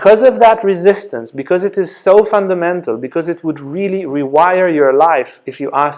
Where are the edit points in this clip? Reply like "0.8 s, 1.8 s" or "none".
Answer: none